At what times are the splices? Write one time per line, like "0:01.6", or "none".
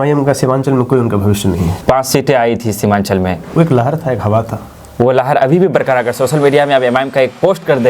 0:01.8